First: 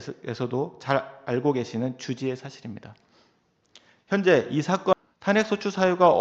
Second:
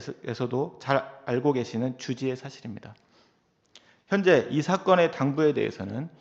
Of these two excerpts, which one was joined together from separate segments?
first; 1 cut; at 4.9 s

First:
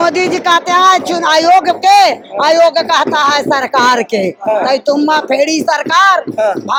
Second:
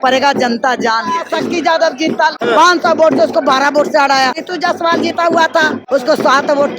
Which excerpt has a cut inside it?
second; 4 cuts; at 1.3 s, 2.4 s, 4.4 s, 5.8 s

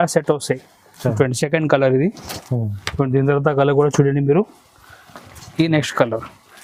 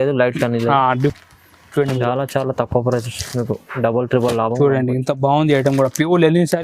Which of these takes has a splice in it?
second; 1 cut; at 1.1 s

